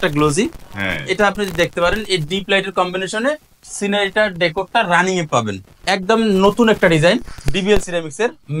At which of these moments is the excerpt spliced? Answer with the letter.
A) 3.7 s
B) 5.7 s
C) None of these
B